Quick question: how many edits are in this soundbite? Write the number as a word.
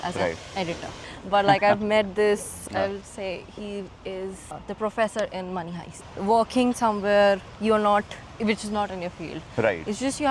four